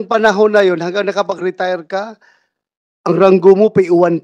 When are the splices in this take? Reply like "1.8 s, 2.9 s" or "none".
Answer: none

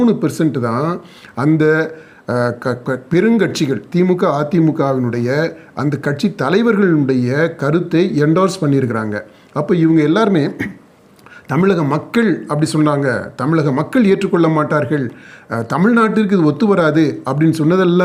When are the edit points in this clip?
none

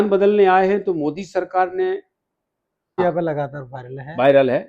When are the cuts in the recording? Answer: 3.0 s

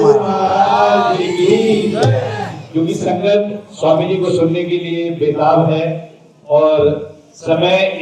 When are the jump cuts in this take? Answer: none

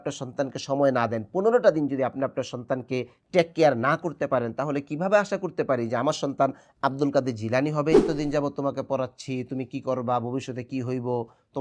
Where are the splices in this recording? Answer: 8.1 s

